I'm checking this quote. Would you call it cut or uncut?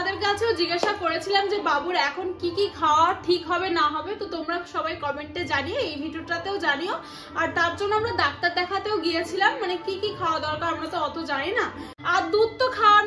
cut